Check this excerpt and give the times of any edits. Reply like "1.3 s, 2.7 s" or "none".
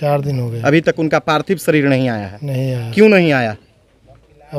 none